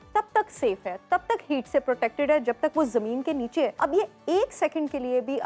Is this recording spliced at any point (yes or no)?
yes